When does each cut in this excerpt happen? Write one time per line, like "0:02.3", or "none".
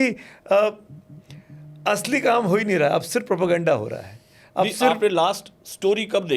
none